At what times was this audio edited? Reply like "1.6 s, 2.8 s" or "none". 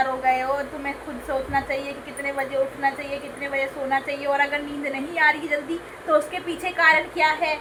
none